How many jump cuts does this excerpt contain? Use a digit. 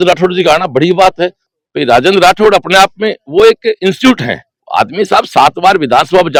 0